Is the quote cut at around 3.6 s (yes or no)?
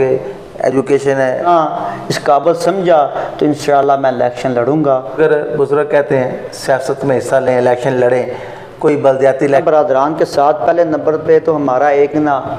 no